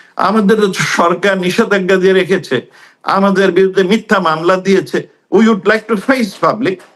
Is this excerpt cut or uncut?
uncut